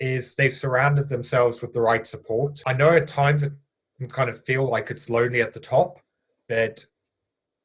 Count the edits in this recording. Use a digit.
1